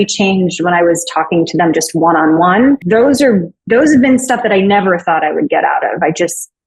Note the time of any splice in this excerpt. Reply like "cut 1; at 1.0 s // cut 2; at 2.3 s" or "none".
cut 1; at 2.8 s